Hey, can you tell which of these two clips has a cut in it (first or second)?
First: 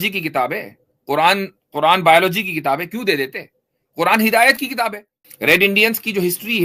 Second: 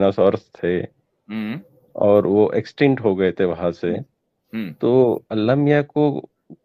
first